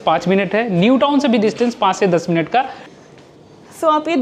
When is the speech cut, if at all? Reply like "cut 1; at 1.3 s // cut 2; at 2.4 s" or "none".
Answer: cut 1; at 2.8 s